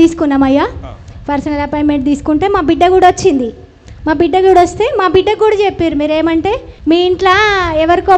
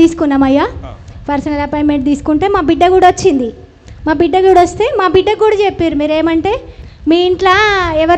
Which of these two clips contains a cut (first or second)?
first